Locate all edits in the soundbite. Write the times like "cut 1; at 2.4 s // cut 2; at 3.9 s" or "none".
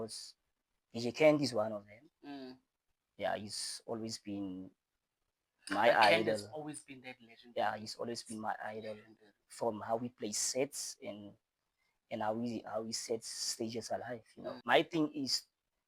cut 1; at 14.5 s